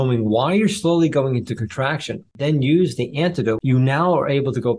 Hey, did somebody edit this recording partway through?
yes; 2 cuts; at 2.3 s, 3.6 s

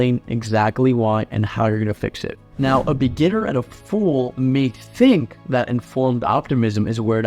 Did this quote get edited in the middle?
no; 0 cuts

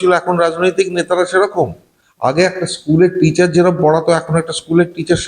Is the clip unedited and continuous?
yes; 0 cuts

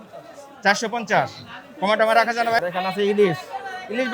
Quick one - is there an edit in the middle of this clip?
yes; 1 cut; at 2.6 s

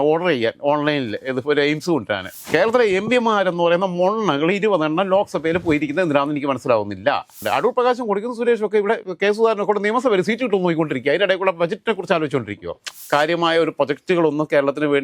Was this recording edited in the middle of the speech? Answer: yes; 3 cuts; at 2.3 s, 7.4 s, 12.9 s

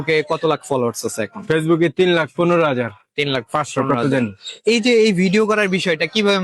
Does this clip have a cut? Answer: no; 0 cuts

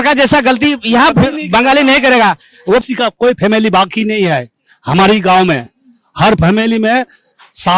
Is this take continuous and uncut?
no; 1 cut; at 2.8 s

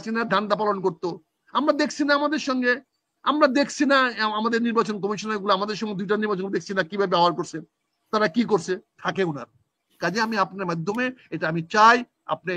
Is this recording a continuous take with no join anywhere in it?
no; 1 cut; at 9.0 s

